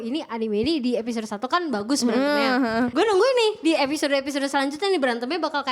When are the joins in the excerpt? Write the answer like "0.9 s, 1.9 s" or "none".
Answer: 2.9 s